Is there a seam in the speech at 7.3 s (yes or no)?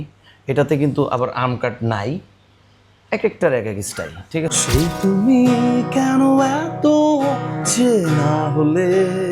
no